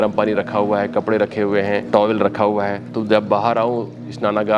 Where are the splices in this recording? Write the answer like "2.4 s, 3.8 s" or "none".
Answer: 1.8 s, 2.9 s